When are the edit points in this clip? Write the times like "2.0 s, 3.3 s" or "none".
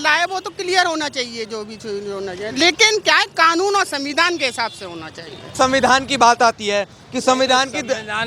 5.5 s